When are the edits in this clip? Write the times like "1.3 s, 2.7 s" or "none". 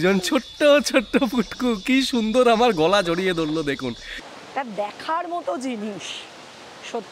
4.1 s